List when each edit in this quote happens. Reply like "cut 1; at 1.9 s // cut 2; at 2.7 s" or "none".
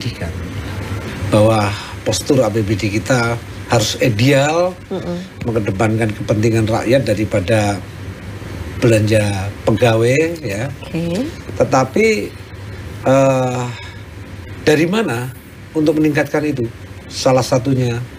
cut 1; at 1.0 s